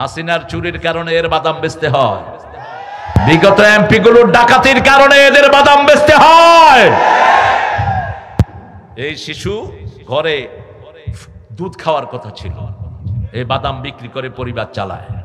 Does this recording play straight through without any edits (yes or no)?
yes